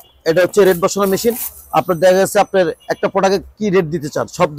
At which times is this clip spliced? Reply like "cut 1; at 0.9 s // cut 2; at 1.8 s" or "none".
none